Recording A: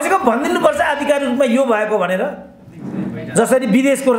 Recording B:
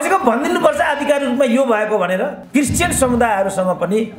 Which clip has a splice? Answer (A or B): B